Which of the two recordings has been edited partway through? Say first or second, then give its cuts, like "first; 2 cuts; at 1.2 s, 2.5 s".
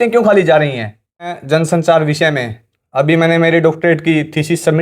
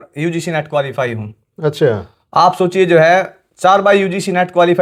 first; 1 cut; at 1.4 s